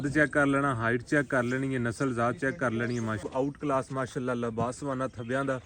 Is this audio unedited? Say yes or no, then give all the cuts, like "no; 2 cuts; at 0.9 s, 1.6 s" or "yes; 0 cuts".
no; 1 cut; at 3.2 s